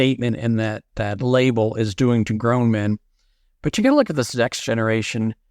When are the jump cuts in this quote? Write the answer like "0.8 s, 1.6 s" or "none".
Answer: 0.9 s